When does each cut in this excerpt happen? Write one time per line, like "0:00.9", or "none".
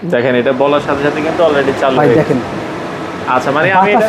none